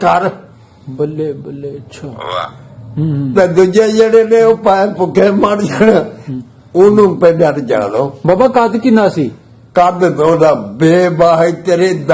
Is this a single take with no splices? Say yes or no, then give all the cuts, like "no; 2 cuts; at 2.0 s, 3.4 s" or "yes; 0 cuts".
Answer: yes; 0 cuts